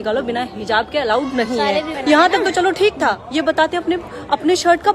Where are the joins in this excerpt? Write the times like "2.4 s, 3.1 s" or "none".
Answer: 1.9 s